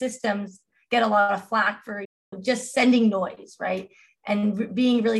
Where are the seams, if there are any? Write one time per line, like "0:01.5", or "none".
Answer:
none